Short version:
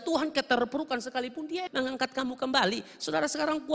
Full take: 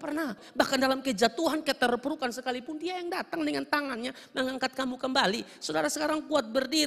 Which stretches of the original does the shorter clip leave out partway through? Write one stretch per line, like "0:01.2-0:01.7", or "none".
0:03.0-0:04.3